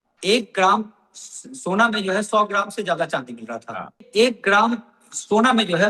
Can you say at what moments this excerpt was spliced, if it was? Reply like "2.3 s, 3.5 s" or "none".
4.0 s